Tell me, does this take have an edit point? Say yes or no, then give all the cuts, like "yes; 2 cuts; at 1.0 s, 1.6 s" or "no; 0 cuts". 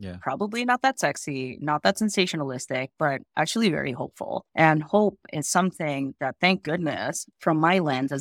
no; 0 cuts